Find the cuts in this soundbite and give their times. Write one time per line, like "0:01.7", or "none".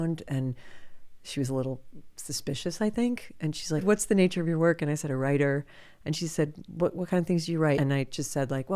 0:03.8
0:07.8